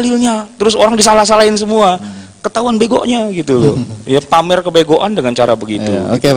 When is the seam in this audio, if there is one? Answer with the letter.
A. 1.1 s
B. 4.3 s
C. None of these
C